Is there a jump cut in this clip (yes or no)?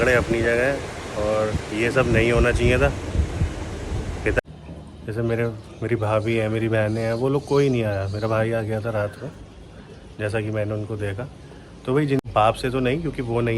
yes